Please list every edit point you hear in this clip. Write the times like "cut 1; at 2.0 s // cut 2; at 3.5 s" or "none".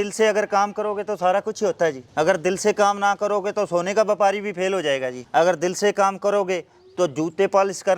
none